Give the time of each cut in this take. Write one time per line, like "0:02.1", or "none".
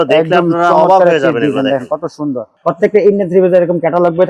0:02.5